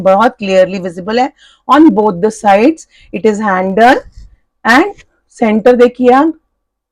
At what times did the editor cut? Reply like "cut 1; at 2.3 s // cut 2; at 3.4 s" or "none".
none